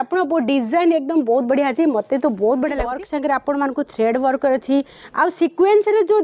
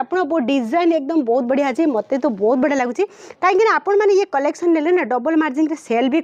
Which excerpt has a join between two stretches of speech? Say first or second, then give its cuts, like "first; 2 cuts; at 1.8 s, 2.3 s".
first; 1 cut; at 2.9 s